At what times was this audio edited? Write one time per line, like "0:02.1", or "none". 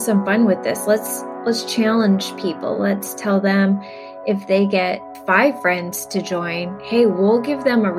none